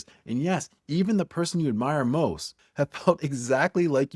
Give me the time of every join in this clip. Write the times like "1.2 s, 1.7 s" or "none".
2.6 s